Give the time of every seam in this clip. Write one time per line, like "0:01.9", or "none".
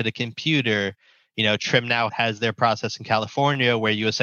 0:02.1

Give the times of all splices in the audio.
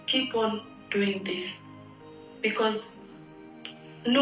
none

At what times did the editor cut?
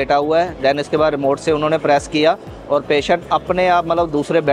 none

